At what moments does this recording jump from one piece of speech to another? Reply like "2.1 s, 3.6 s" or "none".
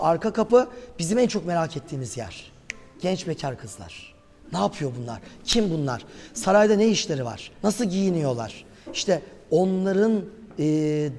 none